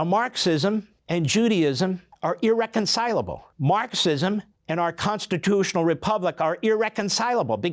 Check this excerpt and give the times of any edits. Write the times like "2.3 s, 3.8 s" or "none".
1.0 s, 2.1 s, 3.4 s, 4.5 s